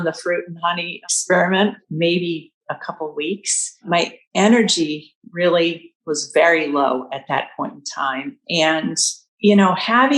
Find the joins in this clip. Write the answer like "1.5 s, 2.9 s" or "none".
0.9 s, 1.8 s